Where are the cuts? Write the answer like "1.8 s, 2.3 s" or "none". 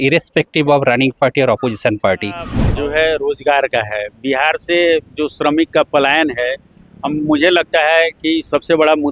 2.6 s